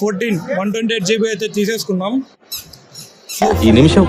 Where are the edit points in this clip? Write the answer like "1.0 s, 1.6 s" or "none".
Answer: none